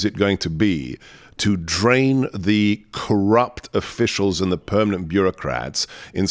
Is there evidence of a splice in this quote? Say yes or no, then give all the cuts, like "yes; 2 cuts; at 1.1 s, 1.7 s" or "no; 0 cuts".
no; 0 cuts